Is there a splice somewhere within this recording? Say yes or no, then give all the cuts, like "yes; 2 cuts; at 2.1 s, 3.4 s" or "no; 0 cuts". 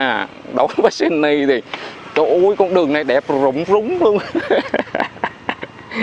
no; 0 cuts